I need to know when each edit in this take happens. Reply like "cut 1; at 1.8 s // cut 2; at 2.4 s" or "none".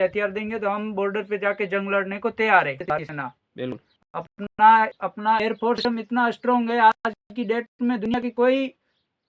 cut 1; at 2.8 s

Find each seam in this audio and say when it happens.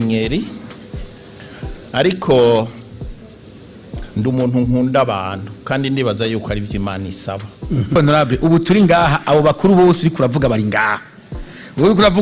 cut 1; at 8.0 s

